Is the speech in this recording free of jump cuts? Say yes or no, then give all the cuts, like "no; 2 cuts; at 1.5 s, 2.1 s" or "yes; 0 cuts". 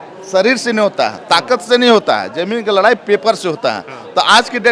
yes; 0 cuts